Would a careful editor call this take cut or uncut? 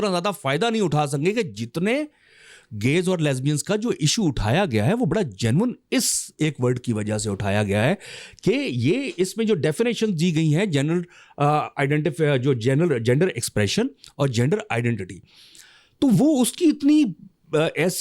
uncut